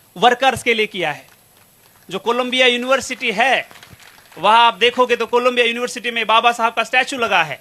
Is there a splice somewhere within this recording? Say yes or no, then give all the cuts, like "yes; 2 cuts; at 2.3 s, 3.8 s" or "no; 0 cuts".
no; 0 cuts